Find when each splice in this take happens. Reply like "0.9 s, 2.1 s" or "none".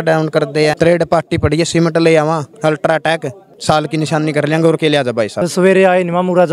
0.8 s, 2.5 s, 3.5 s, 5.4 s